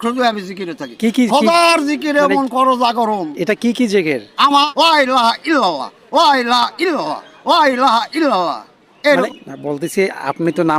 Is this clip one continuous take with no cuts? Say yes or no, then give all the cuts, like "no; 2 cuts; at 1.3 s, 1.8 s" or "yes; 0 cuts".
no; 2 cuts; at 4.7 s, 9.3 s